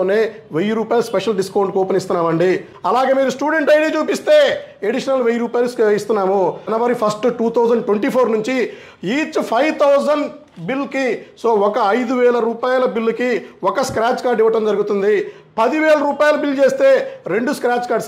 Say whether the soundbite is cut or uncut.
cut